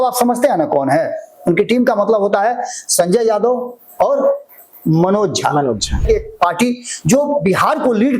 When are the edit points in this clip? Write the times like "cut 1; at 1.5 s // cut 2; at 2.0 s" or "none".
cut 1; at 6.0 s